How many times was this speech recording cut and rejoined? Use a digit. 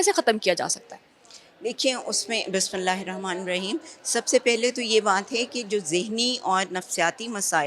0